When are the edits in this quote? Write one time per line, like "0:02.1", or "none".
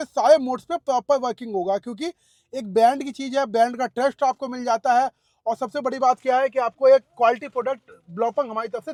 none